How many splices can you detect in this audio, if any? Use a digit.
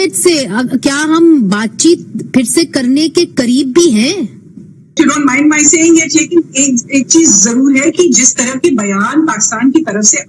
1